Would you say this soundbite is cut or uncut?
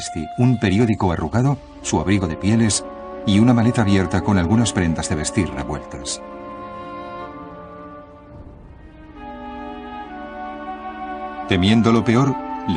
cut